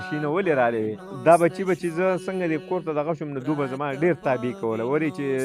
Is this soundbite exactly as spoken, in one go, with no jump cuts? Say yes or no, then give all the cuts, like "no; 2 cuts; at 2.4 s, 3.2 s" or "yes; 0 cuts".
no; 1 cut; at 1.0 s